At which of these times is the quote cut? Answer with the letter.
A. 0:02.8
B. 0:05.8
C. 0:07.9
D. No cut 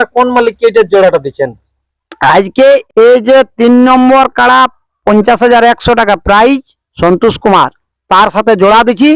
A